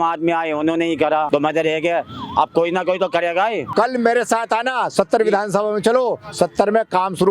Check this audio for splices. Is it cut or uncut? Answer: cut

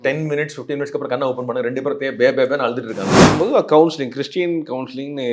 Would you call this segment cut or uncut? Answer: cut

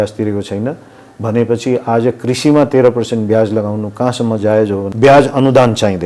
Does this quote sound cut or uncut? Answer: cut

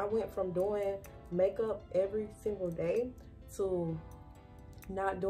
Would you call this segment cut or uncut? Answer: uncut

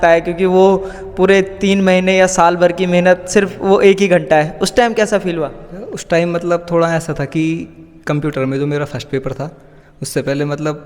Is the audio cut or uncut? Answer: uncut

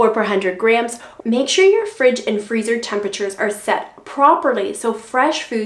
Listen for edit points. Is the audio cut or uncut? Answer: cut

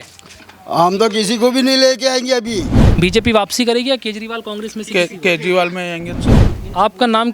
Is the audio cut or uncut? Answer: cut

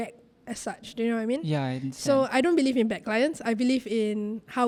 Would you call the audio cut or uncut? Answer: uncut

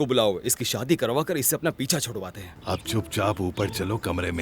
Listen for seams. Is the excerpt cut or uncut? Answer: cut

